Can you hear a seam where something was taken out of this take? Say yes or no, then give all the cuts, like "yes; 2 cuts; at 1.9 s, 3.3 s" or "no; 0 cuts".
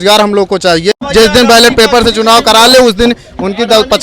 yes; 1 cut; at 1.0 s